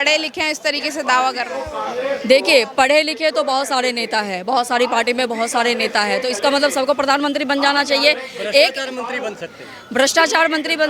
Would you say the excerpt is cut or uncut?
uncut